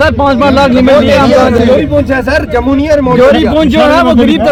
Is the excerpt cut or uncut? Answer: uncut